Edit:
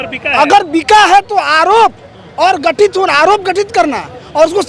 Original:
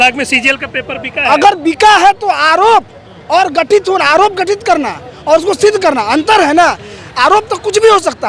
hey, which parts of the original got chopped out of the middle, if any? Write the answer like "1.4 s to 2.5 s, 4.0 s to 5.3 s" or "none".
none